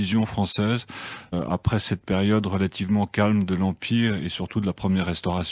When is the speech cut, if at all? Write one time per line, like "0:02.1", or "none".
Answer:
0:03.7